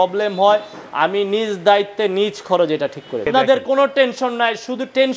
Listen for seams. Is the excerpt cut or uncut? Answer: uncut